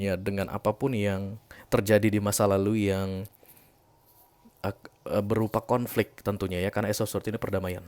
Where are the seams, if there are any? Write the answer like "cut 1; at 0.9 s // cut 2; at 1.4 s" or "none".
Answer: none

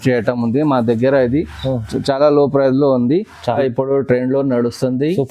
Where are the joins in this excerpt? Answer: cut 1; at 3.6 s

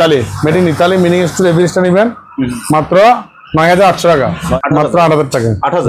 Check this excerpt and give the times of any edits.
cut 1; at 4.5 s

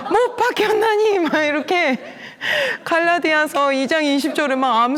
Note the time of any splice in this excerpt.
none

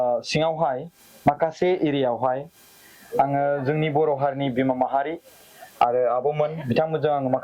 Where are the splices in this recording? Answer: none

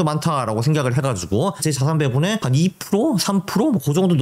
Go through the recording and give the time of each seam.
cut 1; at 1.6 s // cut 2; at 2.4 s

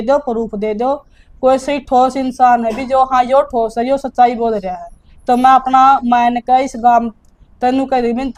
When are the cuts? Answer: none

